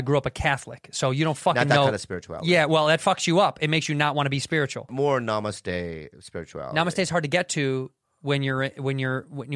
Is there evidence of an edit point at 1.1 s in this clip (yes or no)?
no